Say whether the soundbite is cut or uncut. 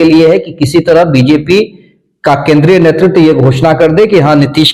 uncut